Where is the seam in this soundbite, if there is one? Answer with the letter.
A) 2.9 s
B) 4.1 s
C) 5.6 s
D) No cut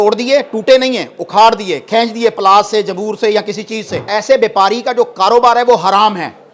B